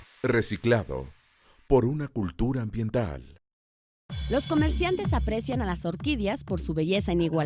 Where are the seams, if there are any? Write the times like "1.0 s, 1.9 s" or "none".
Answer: 1.3 s